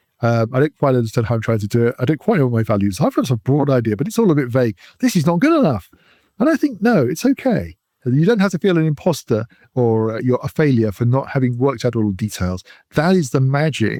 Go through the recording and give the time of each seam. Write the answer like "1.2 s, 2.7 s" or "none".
none